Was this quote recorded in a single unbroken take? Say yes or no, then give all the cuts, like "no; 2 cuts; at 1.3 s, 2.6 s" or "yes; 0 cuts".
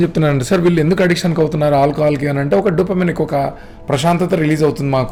yes; 0 cuts